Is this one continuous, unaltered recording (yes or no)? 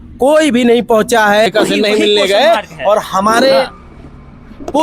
no